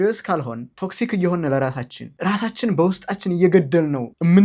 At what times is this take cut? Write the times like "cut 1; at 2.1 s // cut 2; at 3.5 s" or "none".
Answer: none